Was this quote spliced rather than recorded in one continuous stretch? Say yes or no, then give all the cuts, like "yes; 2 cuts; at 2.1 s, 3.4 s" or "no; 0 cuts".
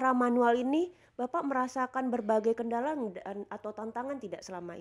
no; 0 cuts